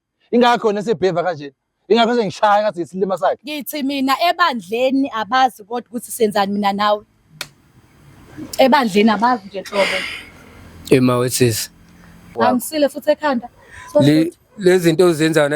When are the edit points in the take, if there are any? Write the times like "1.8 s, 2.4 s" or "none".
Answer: 12.3 s